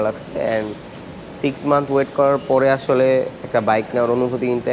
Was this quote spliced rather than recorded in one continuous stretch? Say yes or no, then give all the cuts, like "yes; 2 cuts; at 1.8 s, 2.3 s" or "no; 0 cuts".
no; 0 cuts